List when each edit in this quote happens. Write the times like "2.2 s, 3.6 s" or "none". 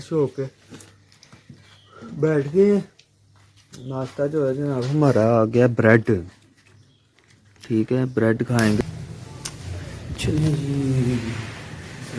8.8 s